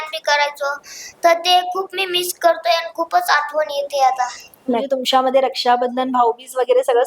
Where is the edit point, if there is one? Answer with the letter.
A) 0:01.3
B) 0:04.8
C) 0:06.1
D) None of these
B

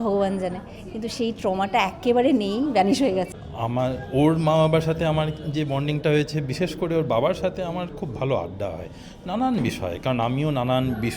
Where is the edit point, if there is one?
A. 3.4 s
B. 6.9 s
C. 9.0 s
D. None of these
A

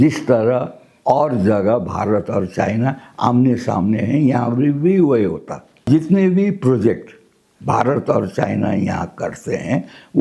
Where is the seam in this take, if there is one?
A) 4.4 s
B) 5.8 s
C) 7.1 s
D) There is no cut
B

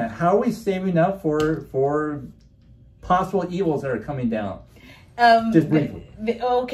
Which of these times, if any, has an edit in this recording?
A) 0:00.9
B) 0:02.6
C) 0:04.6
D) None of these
D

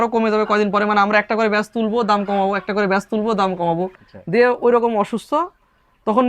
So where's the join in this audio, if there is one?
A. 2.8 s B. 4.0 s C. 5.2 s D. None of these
B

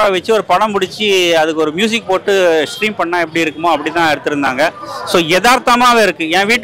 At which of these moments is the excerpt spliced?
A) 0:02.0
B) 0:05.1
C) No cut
C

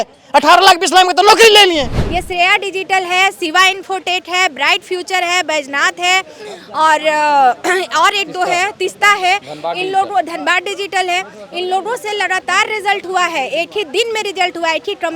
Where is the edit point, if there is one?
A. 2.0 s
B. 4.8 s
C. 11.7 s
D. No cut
A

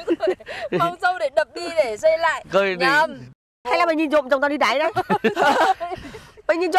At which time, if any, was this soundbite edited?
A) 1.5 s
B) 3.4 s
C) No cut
B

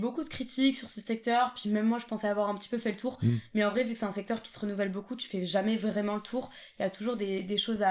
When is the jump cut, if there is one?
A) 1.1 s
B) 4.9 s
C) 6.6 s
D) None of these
D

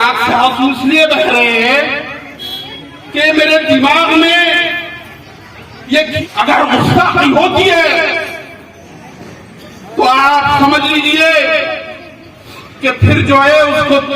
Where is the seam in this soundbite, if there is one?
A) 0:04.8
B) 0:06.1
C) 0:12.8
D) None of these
B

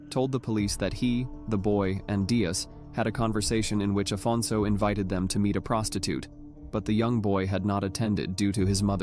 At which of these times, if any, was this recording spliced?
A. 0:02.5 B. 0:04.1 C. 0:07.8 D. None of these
C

